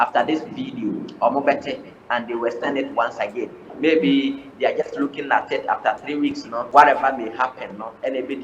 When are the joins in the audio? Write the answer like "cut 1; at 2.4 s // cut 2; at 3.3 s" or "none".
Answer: cut 1; at 6.6 s